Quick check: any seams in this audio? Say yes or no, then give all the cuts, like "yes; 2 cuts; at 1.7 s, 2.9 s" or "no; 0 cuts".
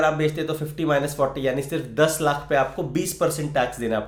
no; 0 cuts